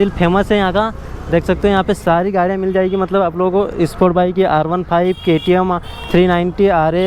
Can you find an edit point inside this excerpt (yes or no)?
no